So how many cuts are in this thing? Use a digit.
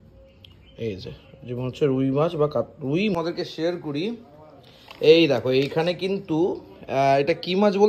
1